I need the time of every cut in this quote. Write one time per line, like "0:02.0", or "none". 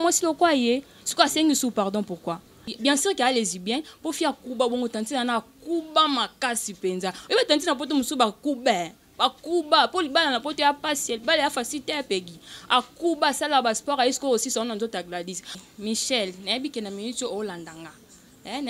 0:02.7
0:15.5